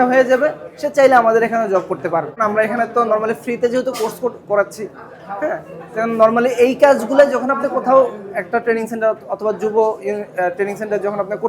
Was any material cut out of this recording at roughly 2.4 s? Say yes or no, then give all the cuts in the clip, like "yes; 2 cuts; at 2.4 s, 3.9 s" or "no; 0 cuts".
yes; 1 cut; at 2.4 s